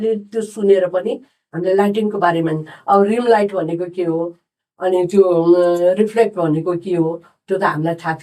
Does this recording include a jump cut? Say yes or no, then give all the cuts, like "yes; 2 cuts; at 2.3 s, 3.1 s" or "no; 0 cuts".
no; 0 cuts